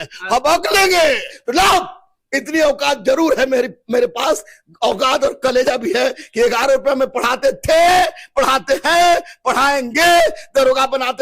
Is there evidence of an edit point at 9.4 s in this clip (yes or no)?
no